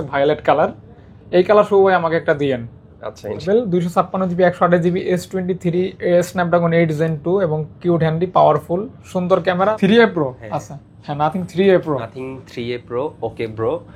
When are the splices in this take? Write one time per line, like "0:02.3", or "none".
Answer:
0:03.4
0:09.7